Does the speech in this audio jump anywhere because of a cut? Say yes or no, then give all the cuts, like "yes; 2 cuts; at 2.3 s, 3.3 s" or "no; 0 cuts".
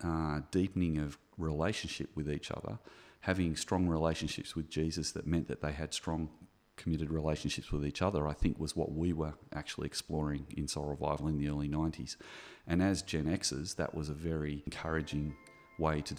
yes; 1 cut; at 14.7 s